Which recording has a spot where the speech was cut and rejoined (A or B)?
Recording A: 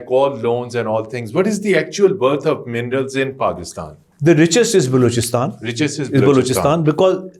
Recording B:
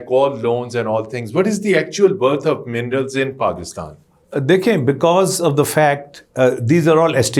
A